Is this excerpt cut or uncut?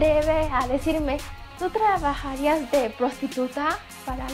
uncut